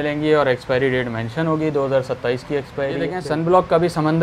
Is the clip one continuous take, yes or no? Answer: no